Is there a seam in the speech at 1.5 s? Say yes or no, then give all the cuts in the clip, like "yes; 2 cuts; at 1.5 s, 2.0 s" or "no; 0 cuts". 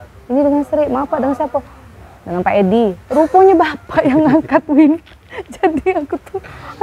no; 0 cuts